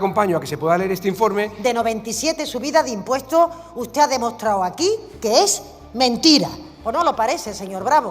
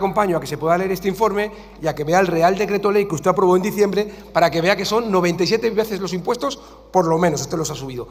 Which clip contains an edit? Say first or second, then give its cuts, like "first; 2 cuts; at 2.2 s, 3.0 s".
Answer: first; 2 cuts; at 1.5 s, 6.7 s